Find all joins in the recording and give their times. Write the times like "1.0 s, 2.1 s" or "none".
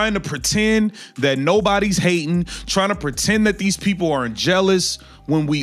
none